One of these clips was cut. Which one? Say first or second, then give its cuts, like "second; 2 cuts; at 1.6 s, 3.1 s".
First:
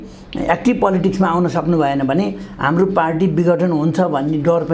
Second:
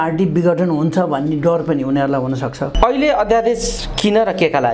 second; 1 cut; at 2.6 s